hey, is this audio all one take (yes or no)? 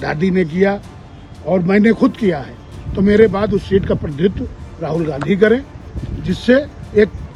yes